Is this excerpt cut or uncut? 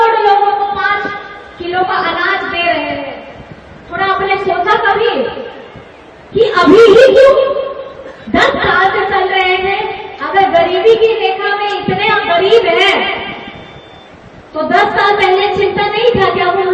uncut